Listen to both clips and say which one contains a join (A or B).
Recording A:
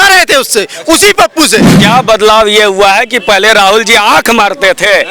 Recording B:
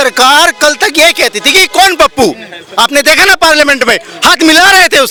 A